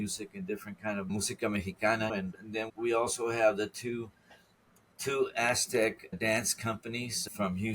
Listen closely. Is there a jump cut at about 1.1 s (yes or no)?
yes